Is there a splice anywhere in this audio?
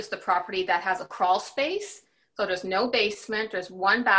yes; 1 cut; at 1.1 s

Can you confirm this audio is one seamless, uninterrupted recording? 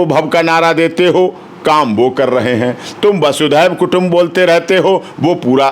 yes; 0 cuts

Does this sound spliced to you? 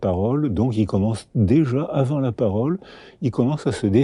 no; 0 cuts

